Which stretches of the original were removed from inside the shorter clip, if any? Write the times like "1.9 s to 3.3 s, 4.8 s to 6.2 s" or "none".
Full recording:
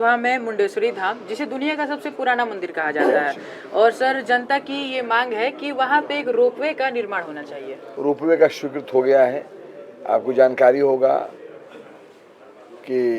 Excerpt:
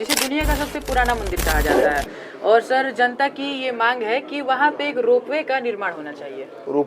none